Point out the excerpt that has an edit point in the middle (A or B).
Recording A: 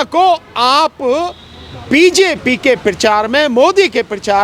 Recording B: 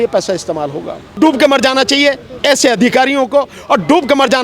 B